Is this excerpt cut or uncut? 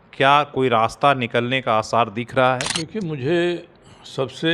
cut